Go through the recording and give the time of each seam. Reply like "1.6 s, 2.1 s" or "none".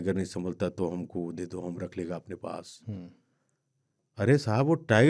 none